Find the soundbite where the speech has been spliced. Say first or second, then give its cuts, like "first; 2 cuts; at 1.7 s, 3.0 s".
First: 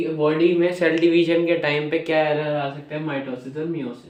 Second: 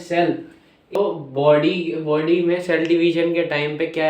second; 1 cut; at 1.0 s